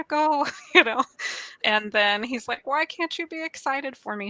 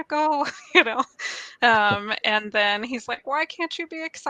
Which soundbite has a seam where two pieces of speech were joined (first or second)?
first